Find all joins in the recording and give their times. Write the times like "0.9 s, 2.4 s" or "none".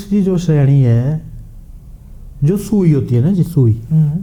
none